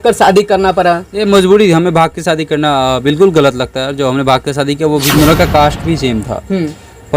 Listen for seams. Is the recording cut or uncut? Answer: cut